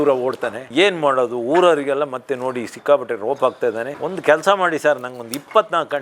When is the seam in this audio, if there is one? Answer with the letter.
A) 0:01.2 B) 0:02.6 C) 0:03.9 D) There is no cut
C